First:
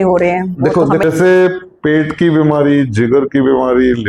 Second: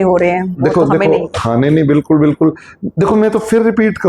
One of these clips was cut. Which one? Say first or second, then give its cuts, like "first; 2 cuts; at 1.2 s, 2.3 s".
first; 1 cut; at 1.0 s